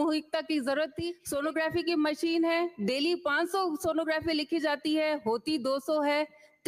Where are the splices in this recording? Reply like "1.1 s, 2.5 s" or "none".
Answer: 1.2 s

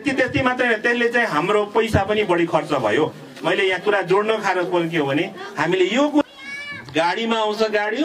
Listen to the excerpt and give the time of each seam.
6.2 s

